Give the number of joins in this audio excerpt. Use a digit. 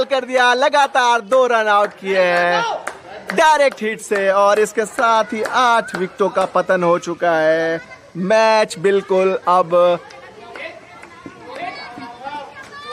0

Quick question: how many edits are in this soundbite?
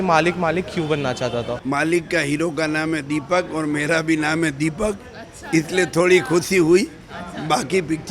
1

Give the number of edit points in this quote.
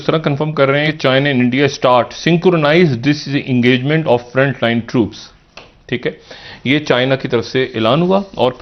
0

